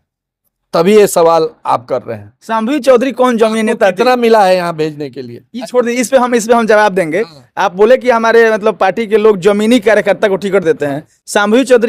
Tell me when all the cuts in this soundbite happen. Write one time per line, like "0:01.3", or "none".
none